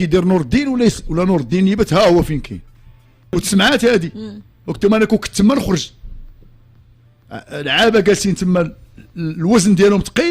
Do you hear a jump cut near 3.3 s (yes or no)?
yes